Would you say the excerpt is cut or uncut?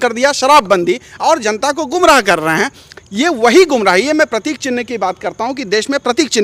uncut